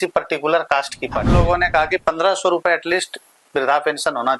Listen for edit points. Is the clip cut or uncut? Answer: cut